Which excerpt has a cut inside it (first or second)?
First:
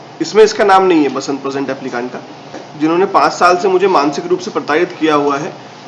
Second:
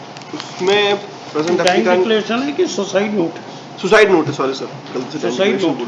first